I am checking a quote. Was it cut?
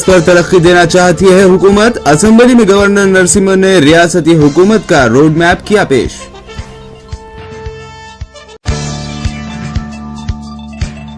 no; 0 cuts

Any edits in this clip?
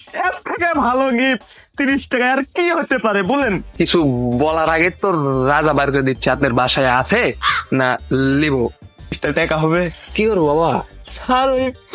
yes; 2 cuts; at 3.7 s, 9.2 s

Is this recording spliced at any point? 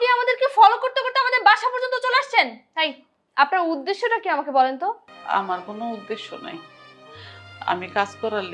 yes; 1 cut; at 5.1 s

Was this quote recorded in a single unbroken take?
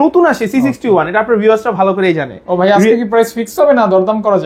yes; 0 cuts

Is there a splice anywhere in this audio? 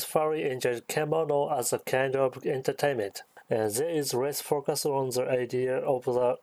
no; 0 cuts

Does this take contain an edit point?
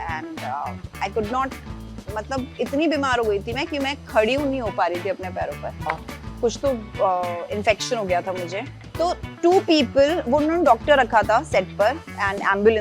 yes; 2 cuts; at 5.9 s, 8.8 s

